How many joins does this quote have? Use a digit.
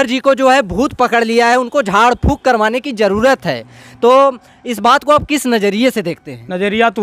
0